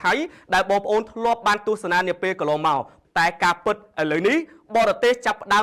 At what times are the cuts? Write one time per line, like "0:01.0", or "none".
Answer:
0:02.9